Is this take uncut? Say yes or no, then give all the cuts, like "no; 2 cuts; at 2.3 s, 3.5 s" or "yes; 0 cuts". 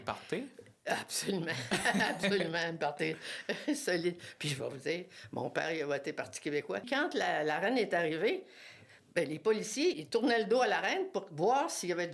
no; 2 cuts; at 6.9 s, 10.0 s